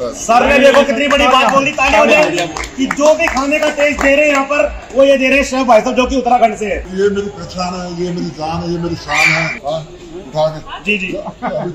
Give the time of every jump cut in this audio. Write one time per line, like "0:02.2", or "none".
0:06.9
0:09.5